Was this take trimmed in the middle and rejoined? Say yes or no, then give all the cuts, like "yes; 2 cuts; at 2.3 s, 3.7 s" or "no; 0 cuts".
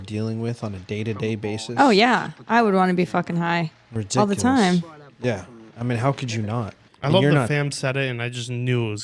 no; 0 cuts